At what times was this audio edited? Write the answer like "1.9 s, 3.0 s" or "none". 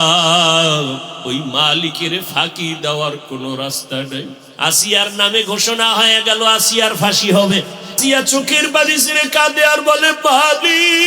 1.1 s, 4.4 s